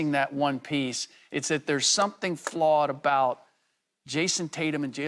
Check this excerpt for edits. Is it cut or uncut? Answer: uncut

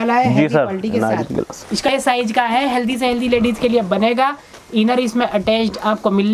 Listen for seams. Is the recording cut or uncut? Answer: cut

